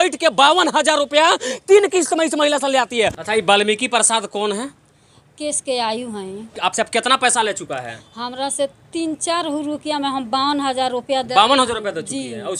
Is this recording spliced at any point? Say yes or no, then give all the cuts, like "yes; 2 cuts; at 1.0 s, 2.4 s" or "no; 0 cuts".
yes; 2 cuts; at 3.2 s, 6.5 s